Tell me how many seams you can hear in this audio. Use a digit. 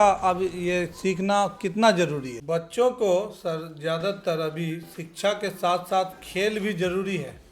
1